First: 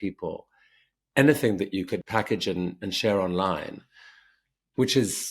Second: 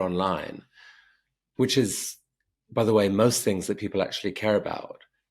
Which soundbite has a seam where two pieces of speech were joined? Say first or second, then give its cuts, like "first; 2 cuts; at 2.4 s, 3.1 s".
first; 1 cut; at 2.1 s